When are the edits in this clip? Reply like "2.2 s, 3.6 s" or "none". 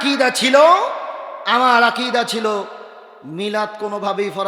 none